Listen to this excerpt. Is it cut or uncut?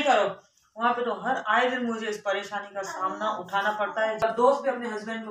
cut